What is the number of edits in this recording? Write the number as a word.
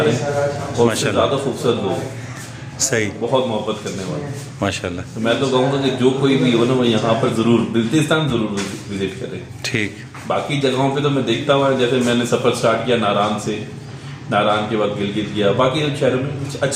zero